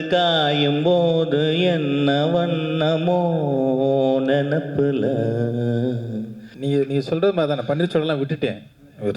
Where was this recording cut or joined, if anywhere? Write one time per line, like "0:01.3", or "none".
0:06.4